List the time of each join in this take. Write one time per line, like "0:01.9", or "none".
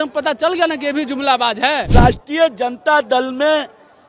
0:01.9